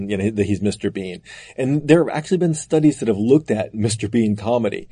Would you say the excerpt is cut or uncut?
uncut